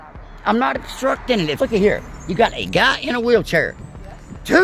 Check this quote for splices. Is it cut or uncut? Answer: cut